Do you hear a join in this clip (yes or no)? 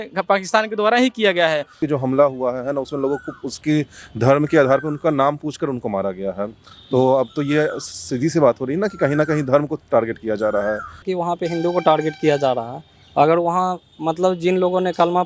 yes